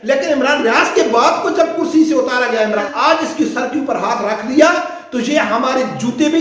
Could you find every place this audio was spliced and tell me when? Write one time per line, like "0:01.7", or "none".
0:02.9